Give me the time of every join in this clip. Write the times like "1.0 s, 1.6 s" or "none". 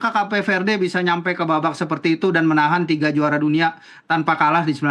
none